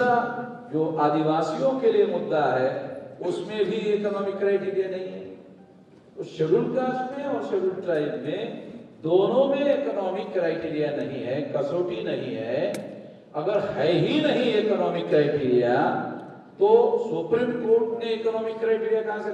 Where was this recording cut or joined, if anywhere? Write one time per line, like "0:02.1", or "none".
none